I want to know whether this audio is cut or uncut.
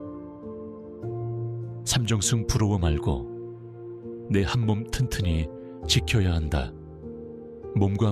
cut